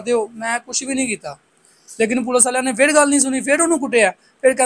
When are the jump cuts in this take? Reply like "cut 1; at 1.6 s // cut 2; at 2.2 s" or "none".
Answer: none